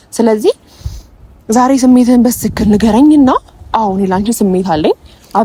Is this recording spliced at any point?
no; 0 cuts

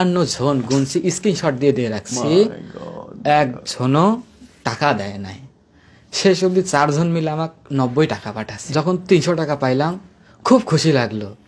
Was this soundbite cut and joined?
yes; 1 cut; at 8.6 s

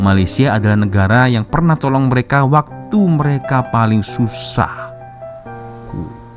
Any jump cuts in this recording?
no; 0 cuts

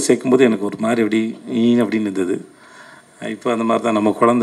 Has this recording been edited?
no; 0 cuts

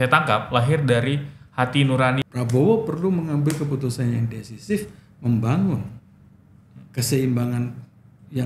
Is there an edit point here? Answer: yes; 1 cut; at 2.2 s

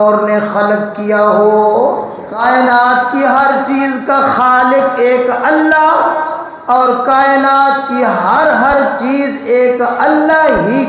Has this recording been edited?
yes; 1 cut; at 2.3 s

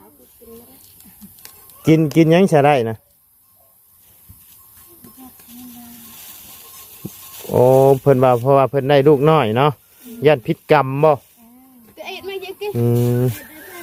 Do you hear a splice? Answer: no; 0 cuts

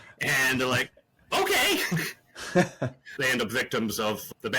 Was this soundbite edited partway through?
yes; 1 cut; at 3.1 s

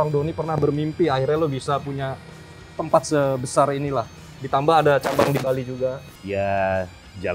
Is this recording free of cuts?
yes; 0 cuts

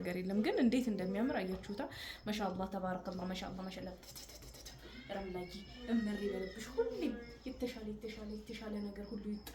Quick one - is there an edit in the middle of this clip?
no; 0 cuts

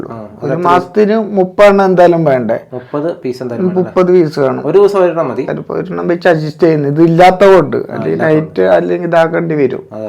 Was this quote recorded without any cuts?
no; 1 cut; at 5.5 s

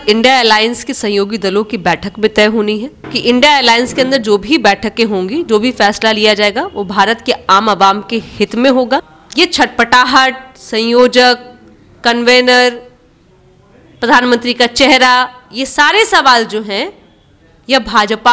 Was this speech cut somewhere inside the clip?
yes; 2 cuts; at 3.1 s, 9.2 s

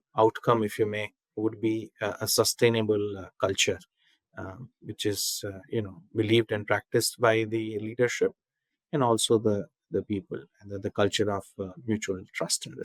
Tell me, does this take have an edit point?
no; 0 cuts

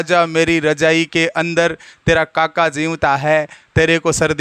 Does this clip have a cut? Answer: no; 0 cuts

